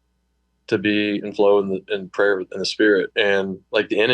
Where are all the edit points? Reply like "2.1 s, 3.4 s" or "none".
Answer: 3.2 s